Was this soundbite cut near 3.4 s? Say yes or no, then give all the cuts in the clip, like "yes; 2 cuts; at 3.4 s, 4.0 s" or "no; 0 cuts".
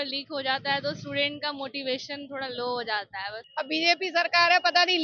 yes; 1 cut; at 3.4 s